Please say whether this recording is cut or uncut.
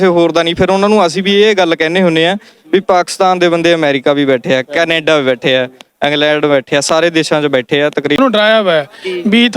cut